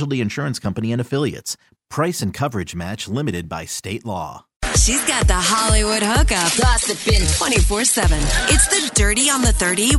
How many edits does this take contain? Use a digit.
1